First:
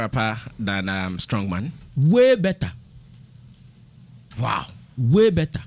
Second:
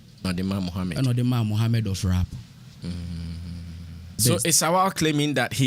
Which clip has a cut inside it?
second; 1 cut; at 4.2 s

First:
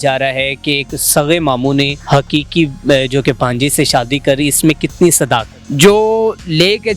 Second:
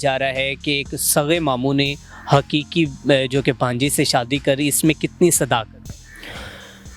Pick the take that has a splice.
first; 2 cuts; at 2.0 s, 5.6 s

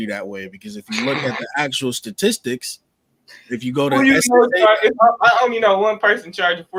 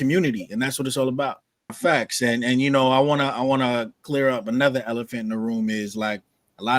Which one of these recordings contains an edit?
second; 1 cut; at 1.8 s

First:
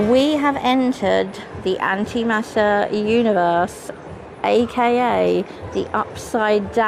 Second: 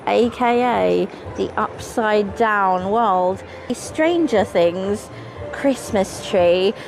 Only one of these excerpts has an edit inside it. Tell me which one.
second; 1 cut; at 3.8 s

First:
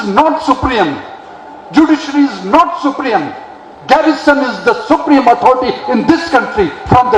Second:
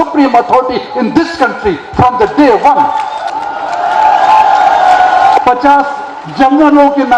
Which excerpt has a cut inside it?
second; 2 cuts; at 3.3 s, 5.4 s

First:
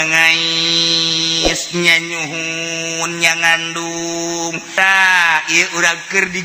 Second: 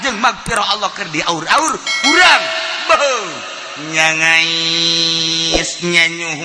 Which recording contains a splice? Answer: first; 1 cut; at 4.7 s

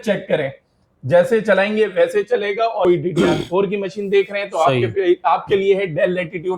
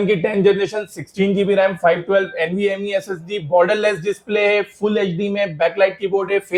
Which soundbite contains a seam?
first; 1 cut; at 2.8 s

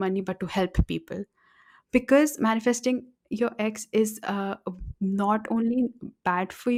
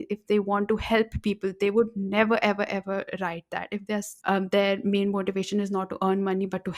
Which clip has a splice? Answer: second; 1 cut; at 4.1 s

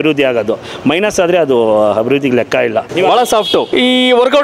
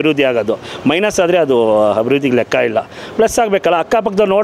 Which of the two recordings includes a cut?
first; 2 cuts; at 2.9 s, 3.7 s

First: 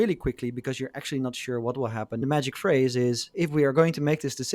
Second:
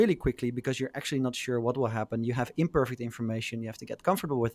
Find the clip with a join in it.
first; 2 cuts; at 2.2 s, 3.3 s

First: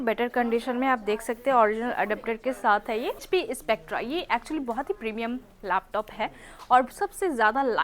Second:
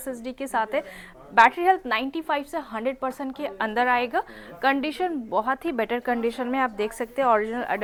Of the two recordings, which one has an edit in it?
first; 1 cut; at 3.2 s

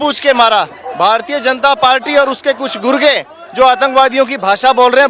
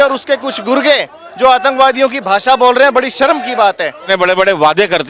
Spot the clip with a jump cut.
second; 1 cut; at 4.0 s

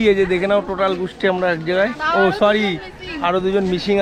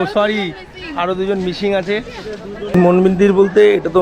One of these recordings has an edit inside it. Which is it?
second; 1 cut; at 2.7 s

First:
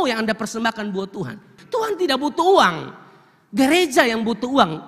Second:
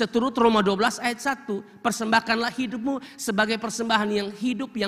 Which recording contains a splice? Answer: first; 1 cut; at 1.6 s

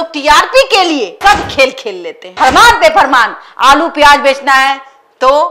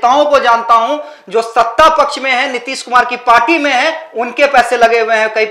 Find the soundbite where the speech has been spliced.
first; 1 cut; at 2.2 s

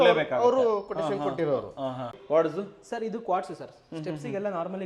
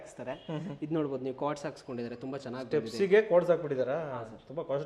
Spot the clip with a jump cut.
first; 1 cut; at 2.2 s

